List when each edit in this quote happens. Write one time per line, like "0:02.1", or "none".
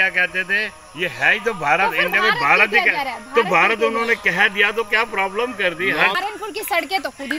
0:06.2